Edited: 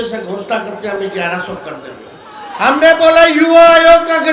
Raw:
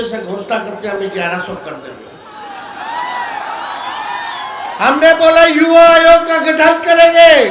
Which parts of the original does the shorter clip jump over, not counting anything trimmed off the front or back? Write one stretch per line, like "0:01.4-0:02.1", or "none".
0:02.5-0:04.7